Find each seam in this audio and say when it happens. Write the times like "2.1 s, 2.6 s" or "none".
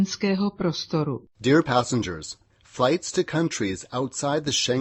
none